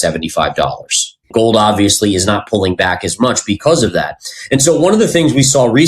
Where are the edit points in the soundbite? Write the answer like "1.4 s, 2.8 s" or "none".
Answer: none